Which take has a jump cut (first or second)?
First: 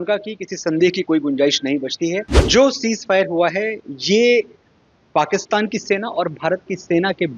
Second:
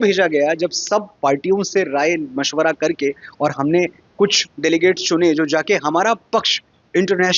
first